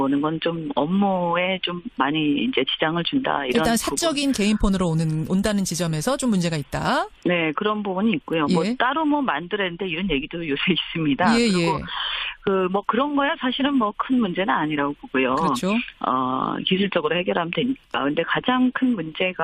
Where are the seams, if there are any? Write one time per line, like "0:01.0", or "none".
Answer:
none